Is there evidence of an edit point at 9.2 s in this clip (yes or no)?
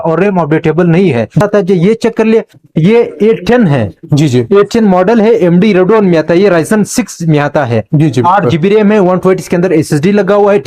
no